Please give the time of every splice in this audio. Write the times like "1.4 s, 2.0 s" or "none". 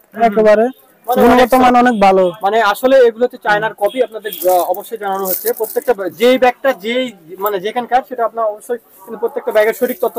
none